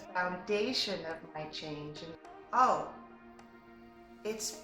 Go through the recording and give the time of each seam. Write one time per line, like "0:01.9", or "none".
0:02.1